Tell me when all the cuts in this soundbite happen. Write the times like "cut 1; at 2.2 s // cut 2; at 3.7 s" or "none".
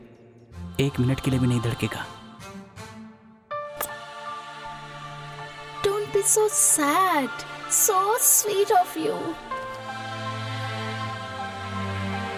none